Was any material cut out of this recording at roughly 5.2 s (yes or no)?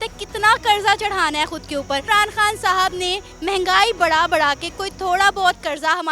no